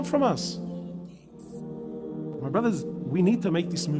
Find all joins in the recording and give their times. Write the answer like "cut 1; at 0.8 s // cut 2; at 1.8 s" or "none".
cut 1; at 1.3 s